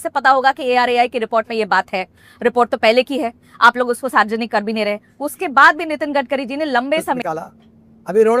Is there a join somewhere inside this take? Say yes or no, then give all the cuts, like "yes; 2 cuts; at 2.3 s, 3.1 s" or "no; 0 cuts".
yes; 1 cut; at 7.2 s